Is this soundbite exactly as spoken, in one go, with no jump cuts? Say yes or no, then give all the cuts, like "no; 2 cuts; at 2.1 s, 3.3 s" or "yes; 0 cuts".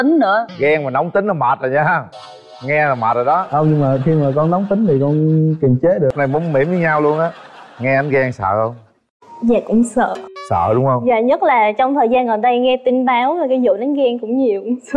no; 1 cut; at 6.1 s